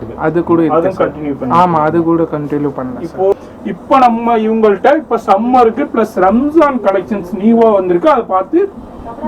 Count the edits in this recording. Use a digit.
1